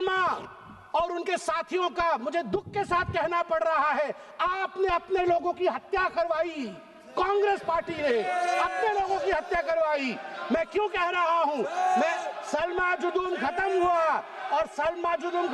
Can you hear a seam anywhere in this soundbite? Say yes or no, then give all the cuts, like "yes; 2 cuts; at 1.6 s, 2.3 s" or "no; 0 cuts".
no; 0 cuts